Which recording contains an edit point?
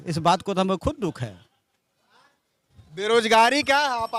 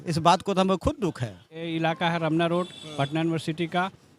second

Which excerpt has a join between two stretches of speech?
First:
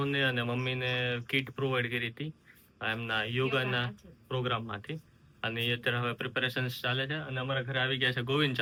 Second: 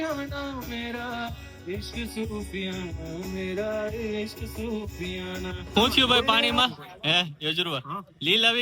second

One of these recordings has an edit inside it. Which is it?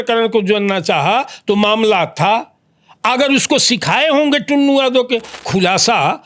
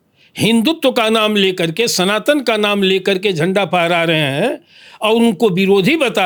first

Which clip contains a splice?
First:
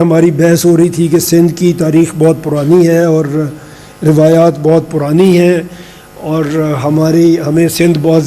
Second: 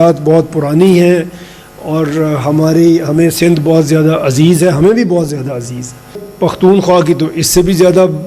second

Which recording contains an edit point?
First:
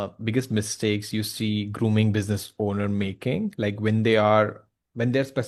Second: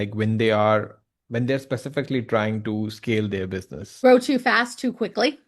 second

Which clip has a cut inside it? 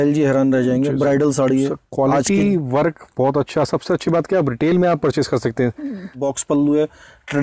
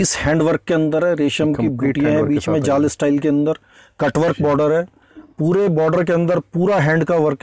first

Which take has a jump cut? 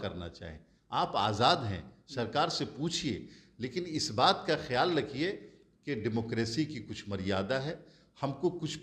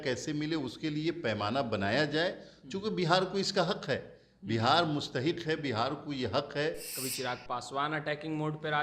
second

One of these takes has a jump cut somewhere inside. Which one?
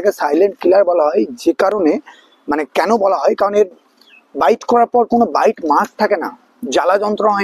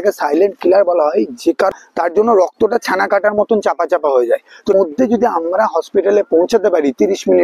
second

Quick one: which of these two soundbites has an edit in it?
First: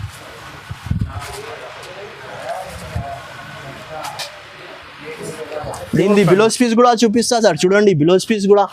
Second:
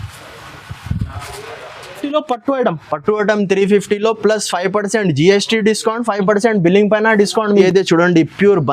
second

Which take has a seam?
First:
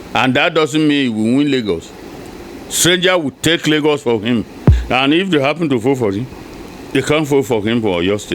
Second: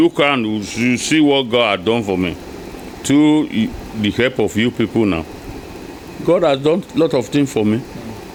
first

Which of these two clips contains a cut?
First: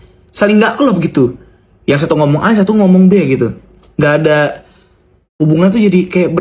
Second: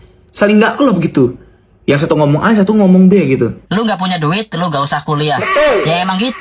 second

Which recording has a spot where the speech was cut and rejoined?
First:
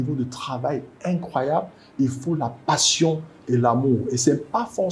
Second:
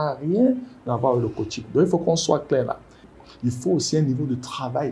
second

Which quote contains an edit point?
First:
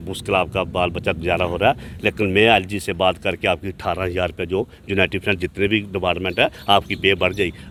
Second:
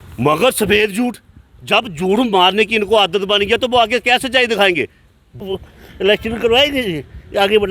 second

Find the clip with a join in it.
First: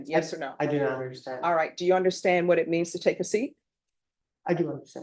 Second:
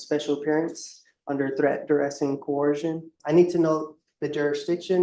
second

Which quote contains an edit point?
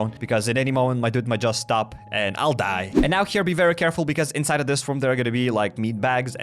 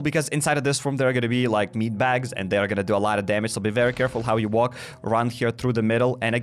first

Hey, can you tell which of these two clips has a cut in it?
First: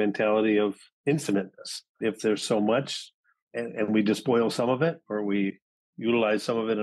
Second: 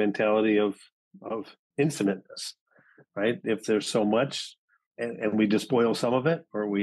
first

